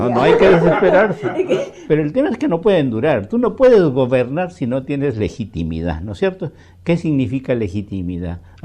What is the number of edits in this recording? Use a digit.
1